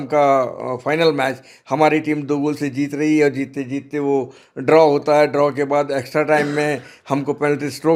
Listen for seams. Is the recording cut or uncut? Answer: uncut